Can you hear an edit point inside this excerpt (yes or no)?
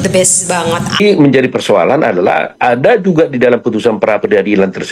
yes